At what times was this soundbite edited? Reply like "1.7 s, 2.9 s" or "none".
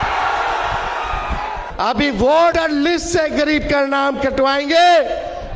1.6 s, 2.5 s